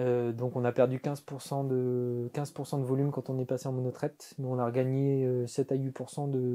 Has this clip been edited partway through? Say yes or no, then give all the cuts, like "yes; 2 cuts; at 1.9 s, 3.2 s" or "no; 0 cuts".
no; 0 cuts